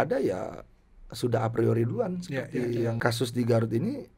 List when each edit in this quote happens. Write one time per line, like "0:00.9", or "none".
0:03.0

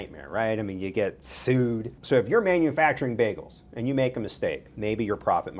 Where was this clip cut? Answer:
0:01.9

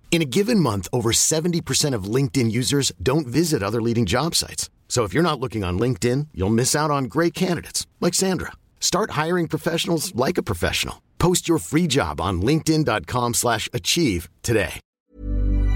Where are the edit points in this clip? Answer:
0:14.8

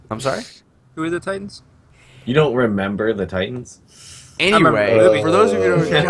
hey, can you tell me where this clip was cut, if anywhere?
none

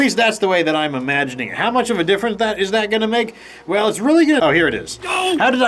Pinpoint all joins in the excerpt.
0:04.4

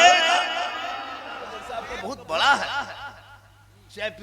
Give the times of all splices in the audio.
0:01.6

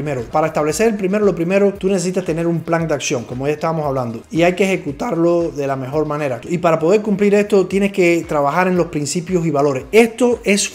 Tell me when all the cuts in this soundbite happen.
0:06.4

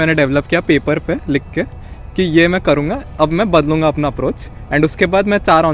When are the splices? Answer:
none

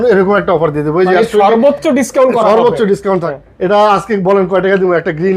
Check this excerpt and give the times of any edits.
0:03.3

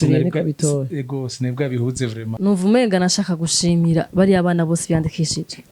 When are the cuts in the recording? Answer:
0:02.3

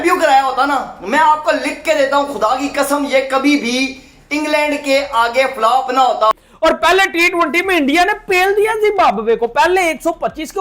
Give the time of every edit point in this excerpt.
0:06.4

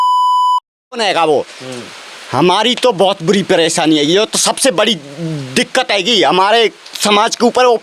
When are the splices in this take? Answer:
0:00.9

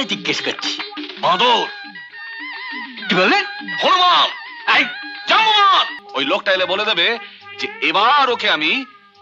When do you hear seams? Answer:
0:06.0

